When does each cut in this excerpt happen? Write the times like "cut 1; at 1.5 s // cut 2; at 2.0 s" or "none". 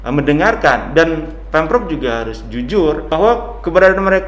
cut 1; at 3.1 s